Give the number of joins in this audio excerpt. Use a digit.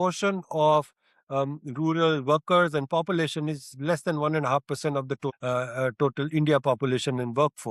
0